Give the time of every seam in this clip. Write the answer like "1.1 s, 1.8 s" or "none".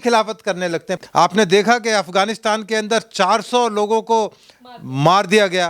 0.9 s